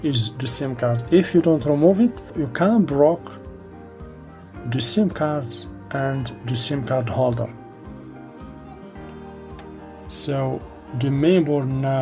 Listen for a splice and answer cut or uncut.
cut